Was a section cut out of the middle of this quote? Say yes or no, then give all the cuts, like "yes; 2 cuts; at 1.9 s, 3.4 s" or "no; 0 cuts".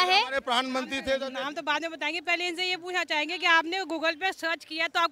yes; 1 cut; at 1.3 s